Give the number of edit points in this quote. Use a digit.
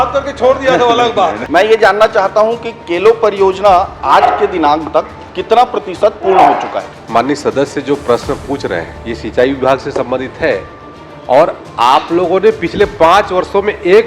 3